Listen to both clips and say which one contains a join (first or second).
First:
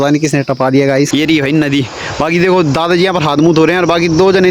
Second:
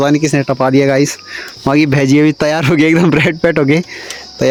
first